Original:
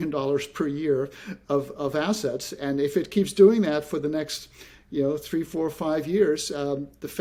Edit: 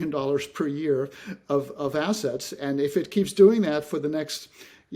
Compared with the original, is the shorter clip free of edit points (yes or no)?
yes